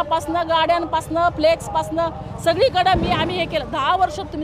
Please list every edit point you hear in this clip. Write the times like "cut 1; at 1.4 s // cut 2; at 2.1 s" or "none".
none